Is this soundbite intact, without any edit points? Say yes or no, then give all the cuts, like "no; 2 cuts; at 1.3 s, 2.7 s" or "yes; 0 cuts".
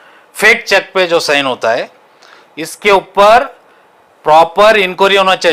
yes; 0 cuts